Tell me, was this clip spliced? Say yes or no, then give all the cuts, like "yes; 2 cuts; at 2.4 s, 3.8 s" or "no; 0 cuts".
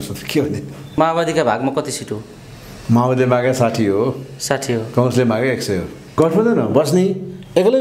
yes; 2 cuts; at 1.0 s, 6.1 s